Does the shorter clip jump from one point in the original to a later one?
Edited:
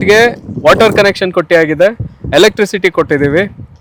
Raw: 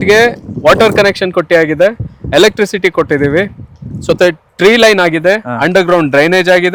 no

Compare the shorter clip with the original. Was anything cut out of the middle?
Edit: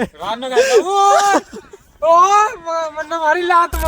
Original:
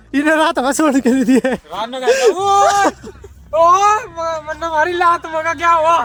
no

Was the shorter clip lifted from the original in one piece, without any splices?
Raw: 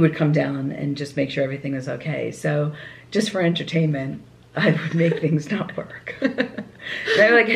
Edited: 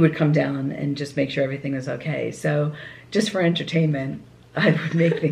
yes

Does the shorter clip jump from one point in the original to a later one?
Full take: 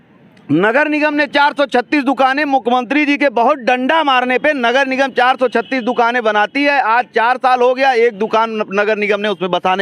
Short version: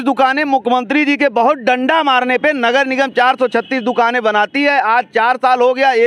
no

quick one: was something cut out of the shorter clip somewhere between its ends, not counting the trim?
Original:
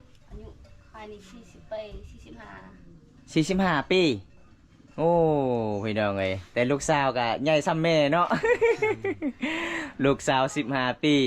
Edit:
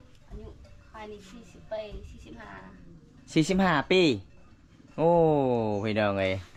no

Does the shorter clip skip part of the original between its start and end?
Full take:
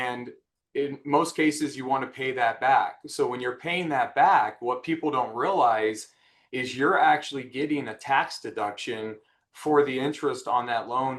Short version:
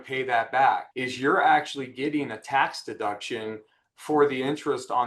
yes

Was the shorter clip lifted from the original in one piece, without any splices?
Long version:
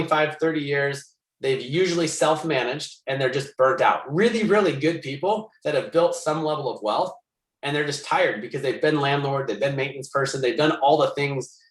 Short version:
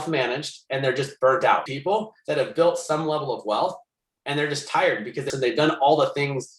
no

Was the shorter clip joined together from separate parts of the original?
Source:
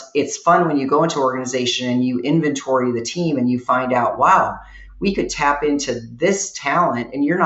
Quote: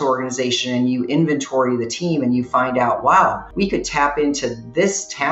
yes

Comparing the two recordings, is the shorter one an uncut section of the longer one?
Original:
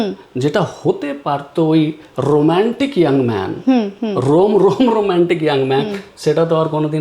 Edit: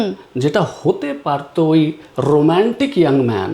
yes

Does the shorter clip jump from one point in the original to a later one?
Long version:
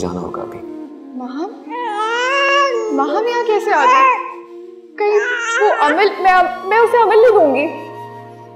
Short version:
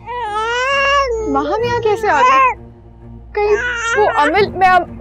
no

